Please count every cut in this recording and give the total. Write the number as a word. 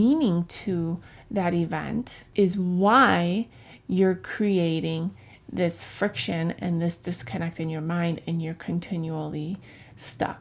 one